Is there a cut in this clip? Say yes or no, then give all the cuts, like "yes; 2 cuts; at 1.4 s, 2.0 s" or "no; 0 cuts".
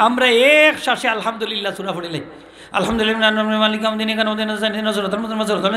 no; 0 cuts